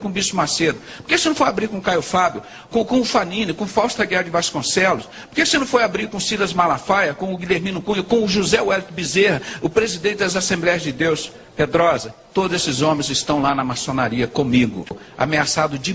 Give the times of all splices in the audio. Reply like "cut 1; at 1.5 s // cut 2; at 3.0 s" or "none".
cut 1; at 14.9 s